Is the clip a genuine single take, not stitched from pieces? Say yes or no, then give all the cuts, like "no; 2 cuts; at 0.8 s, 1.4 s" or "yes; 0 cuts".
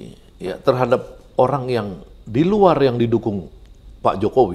yes; 0 cuts